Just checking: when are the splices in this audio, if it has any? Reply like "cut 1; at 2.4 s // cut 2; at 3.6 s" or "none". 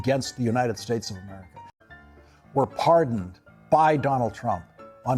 cut 1; at 1.7 s

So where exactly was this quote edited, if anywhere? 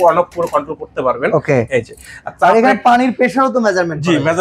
none

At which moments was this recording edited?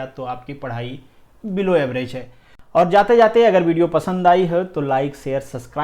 cut 1; at 2.5 s

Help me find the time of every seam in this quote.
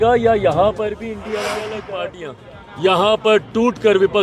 cut 1; at 1.9 s

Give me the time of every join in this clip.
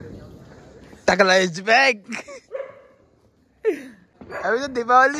cut 1; at 4.0 s

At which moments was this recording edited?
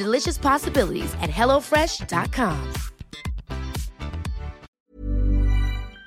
cut 1; at 4.8 s

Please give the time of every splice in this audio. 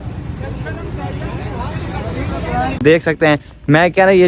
cut 1; at 2.8 s

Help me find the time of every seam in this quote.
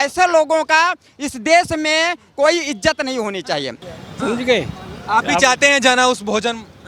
cut 1; at 3.8 s

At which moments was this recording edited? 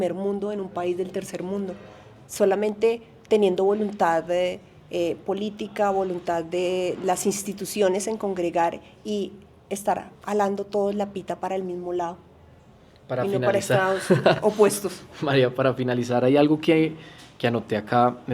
none

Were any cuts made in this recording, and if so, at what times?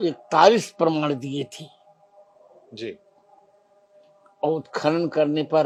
none

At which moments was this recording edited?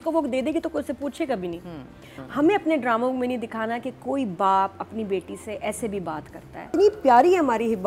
cut 1; at 2.2 s // cut 2; at 6.7 s

